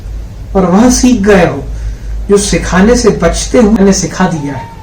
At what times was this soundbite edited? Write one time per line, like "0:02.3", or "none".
0:03.8